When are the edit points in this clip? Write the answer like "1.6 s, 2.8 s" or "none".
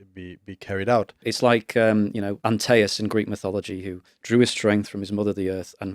1.3 s, 2.3 s